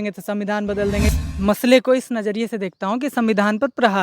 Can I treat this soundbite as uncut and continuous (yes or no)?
no